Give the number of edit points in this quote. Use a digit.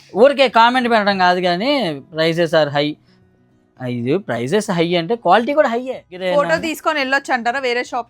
1